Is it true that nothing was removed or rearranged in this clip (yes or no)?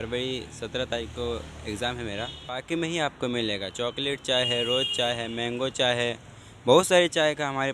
no